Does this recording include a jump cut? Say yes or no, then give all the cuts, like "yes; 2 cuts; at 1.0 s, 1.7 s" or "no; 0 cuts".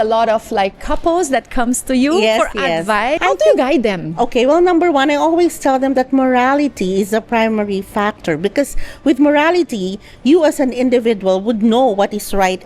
yes; 1 cut; at 3.2 s